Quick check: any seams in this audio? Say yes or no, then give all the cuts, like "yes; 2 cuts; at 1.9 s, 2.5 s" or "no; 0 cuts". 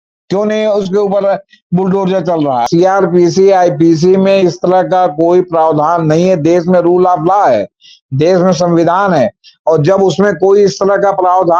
yes; 1 cut; at 2.7 s